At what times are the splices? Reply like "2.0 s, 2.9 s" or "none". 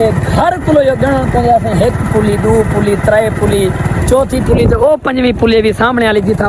none